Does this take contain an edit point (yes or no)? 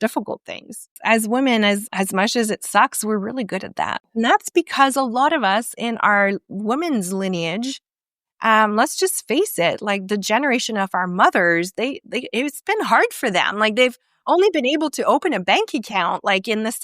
yes